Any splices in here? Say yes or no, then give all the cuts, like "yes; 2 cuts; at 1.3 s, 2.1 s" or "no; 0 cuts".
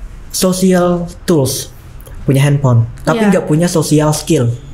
no; 0 cuts